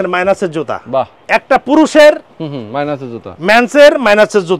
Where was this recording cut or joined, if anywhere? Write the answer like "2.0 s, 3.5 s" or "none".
1.2 s